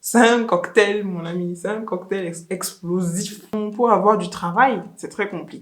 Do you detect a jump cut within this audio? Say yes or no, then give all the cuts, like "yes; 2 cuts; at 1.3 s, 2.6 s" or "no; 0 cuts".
yes; 1 cut; at 3.5 s